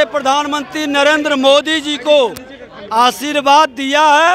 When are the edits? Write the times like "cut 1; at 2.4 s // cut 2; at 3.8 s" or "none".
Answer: none